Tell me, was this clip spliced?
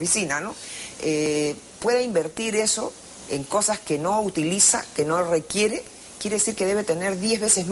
yes; 1 cut; at 4.4 s

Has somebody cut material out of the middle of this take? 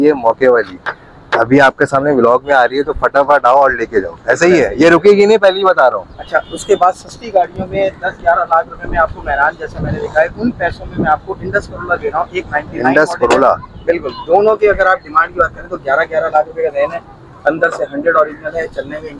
no; 0 cuts

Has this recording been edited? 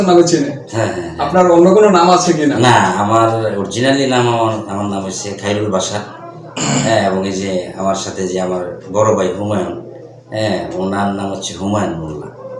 no; 0 cuts

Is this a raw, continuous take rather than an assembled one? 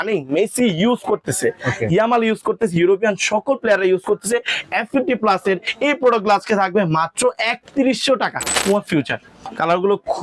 no; 1 cut; at 8.9 s

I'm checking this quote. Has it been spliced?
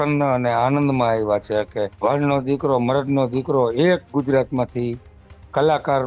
yes; 1 cut; at 1.9 s

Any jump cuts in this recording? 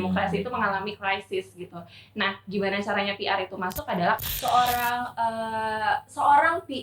yes; 1 cut; at 4.2 s

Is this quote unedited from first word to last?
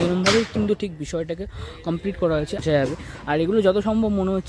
no; 1 cut; at 2.6 s

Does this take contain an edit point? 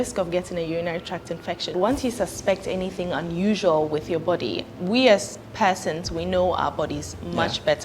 yes; 1 cut; at 1.8 s

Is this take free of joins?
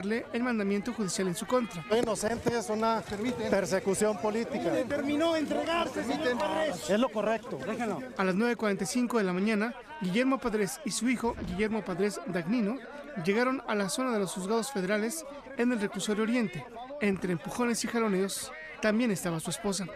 no; 1 cut; at 9.3 s

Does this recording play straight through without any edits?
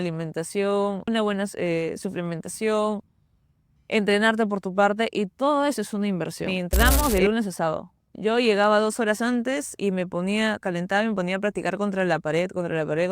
no; 2 cuts; at 1.1 s, 6.9 s

